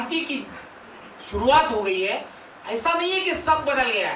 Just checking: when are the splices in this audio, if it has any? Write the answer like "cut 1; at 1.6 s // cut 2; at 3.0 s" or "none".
none